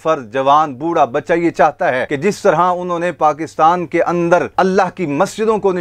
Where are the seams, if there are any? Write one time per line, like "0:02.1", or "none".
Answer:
0:02.1